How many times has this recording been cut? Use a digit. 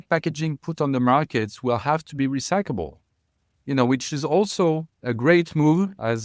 0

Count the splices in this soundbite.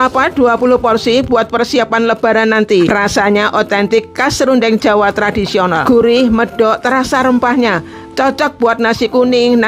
2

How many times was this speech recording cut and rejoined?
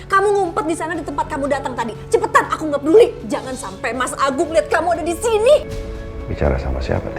1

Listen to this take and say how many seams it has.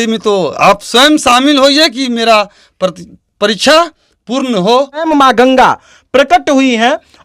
1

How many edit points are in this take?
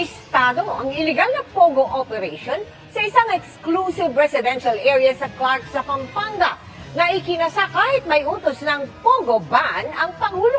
2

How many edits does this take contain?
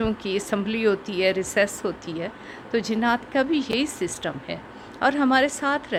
0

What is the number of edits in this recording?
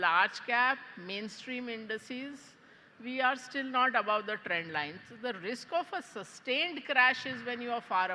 0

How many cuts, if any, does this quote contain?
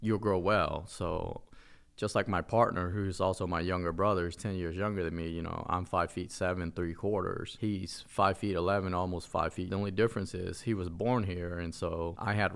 1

